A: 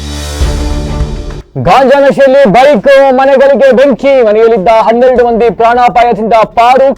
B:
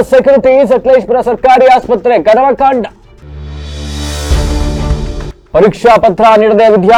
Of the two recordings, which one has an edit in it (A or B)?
A